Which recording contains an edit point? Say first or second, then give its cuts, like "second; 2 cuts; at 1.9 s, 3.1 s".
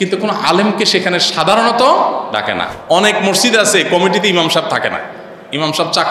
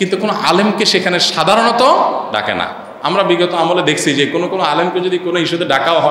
first; 1 cut; at 2.7 s